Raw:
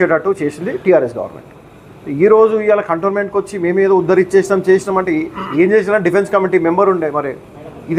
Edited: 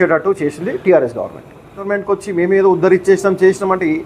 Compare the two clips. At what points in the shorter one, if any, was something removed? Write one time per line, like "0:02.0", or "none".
0:01.9